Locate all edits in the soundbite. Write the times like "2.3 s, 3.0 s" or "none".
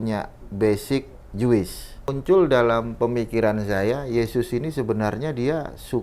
2.2 s